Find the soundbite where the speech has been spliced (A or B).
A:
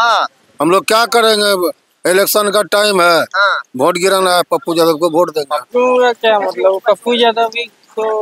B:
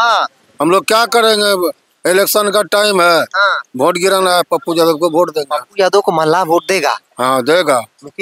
A